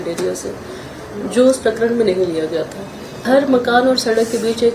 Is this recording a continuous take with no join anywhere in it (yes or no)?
no